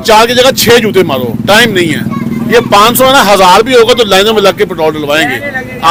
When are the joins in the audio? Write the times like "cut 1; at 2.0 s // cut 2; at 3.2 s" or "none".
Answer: none

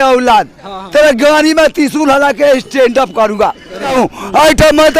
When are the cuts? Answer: cut 1; at 3.9 s

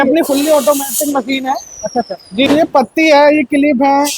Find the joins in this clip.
cut 1; at 2.5 s

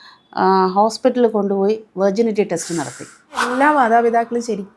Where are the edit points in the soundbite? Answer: cut 1; at 3.5 s

